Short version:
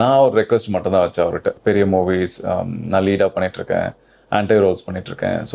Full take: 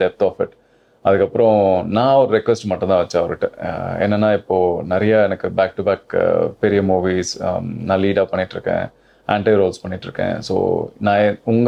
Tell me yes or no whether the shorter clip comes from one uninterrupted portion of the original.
no